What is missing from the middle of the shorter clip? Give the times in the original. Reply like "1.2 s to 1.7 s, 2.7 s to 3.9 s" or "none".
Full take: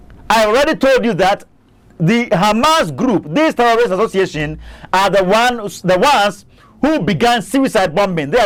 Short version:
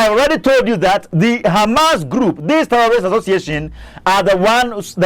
1.4 s to 1.9 s